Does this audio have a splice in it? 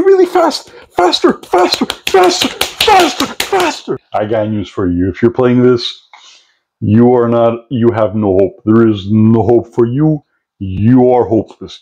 yes; 1 cut; at 4.0 s

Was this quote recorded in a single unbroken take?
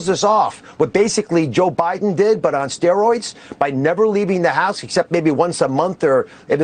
yes; 0 cuts

